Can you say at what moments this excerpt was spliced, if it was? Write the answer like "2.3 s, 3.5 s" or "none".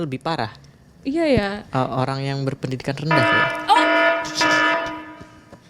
3.6 s